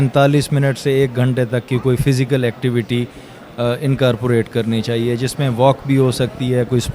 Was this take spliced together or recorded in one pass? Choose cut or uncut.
uncut